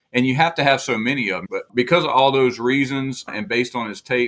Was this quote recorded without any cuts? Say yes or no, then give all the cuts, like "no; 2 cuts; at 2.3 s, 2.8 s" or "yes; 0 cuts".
no; 2 cuts; at 1.6 s, 3.3 s